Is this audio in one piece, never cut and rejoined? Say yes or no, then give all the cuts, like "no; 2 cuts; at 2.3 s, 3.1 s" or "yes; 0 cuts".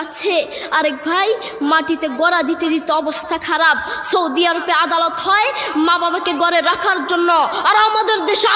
yes; 0 cuts